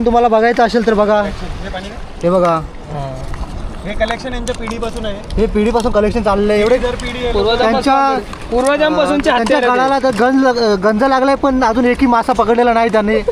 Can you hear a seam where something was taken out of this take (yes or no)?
no